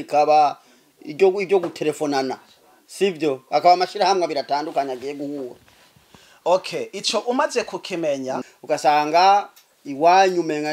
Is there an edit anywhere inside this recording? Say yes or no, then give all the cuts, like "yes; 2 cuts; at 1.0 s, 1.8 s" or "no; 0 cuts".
yes; 1 cut; at 8.5 s